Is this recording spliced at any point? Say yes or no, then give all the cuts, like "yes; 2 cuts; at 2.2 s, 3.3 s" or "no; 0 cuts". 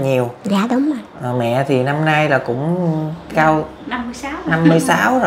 no; 0 cuts